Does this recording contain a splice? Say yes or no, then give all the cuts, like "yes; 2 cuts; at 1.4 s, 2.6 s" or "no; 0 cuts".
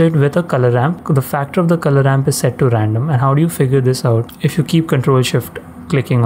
no; 0 cuts